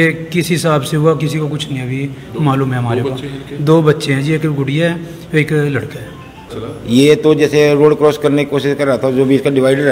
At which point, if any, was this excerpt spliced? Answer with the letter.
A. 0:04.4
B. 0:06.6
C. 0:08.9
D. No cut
B